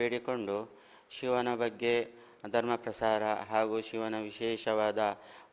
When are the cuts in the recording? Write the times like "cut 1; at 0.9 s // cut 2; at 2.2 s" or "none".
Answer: none